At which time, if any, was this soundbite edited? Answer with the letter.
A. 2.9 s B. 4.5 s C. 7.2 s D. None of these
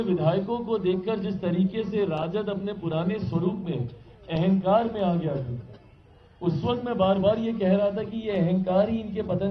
D